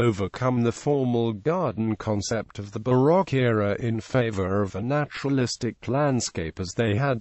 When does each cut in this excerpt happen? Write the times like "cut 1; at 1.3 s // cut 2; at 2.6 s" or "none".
cut 1; at 5.4 s